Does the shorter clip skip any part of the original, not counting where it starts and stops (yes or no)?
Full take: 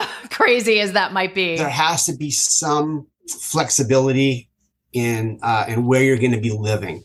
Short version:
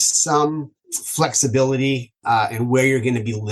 yes